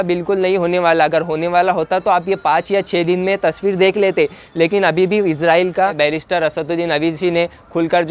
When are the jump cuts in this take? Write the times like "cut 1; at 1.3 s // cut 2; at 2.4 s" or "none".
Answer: cut 1; at 5.9 s